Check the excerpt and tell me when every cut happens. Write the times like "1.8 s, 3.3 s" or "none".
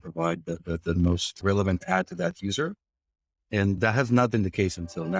1.3 s, 3.8 s